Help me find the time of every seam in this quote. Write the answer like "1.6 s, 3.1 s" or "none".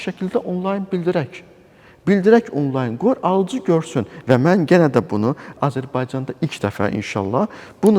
none